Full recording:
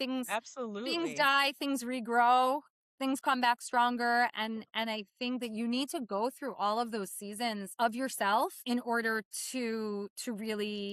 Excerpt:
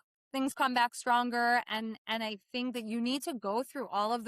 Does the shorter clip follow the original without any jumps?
yes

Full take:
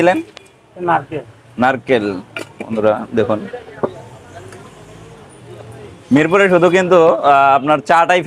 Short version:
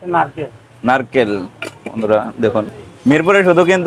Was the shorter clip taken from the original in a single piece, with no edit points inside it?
no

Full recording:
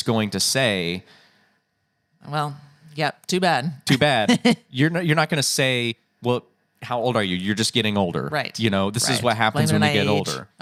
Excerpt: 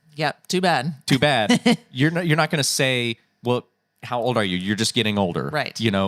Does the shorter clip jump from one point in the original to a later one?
no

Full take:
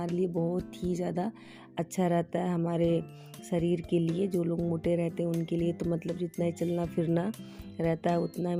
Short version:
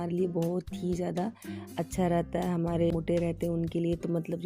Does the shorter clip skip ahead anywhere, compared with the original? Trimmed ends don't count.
yes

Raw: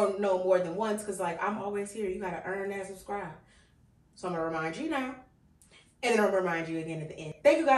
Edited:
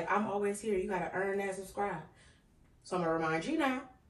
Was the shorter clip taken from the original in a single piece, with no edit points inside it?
yes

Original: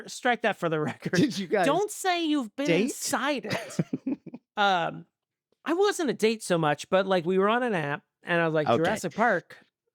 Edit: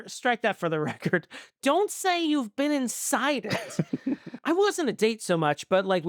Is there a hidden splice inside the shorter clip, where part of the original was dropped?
yes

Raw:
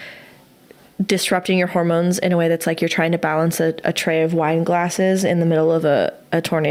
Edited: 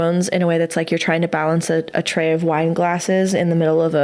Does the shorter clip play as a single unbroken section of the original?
yes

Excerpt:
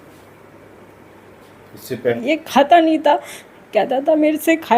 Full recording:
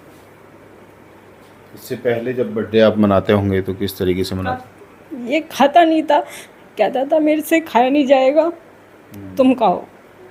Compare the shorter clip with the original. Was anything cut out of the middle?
yes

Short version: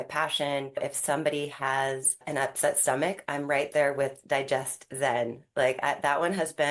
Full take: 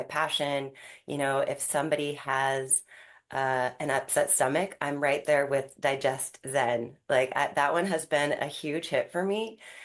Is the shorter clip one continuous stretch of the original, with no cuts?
no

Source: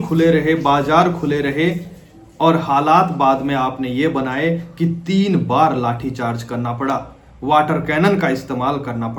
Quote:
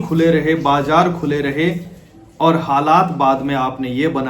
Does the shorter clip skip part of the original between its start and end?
no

